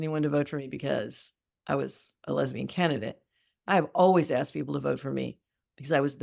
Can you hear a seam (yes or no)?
no